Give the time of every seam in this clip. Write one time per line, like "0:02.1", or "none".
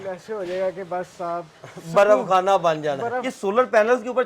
0:03.2